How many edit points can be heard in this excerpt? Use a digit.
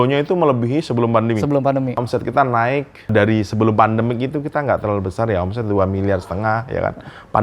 2